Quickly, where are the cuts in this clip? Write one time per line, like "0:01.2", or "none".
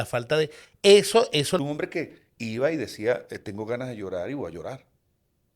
0:01.6

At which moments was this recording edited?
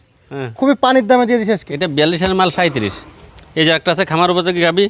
0:01.7

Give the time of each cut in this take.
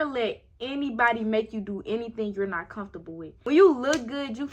0:03.3

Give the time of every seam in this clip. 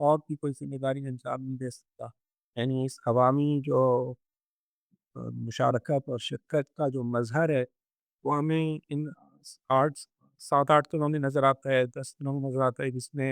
0:02.5

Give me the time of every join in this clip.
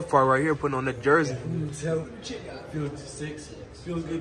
0:02.2

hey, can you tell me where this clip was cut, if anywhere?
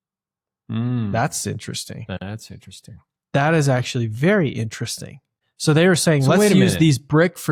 none

